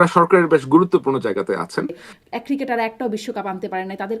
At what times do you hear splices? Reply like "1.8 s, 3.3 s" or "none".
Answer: 2.1 s